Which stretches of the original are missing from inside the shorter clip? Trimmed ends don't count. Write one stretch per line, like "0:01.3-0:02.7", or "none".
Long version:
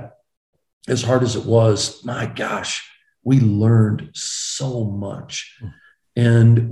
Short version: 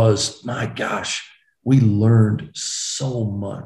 none